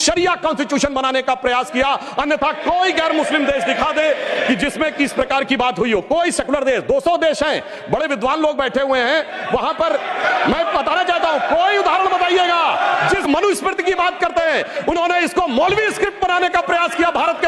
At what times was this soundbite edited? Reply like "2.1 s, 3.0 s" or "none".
none